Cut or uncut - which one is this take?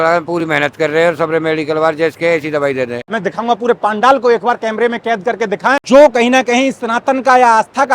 cut